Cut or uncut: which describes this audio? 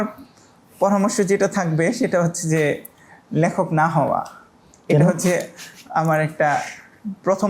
uncut